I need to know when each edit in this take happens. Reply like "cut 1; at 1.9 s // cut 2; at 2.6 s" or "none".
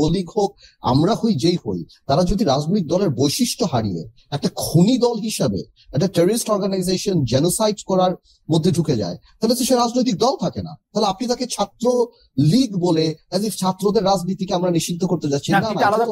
none